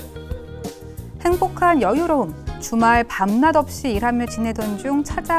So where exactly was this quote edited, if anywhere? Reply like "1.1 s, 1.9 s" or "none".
1.2 s